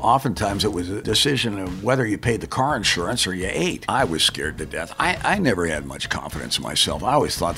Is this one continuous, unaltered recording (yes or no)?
no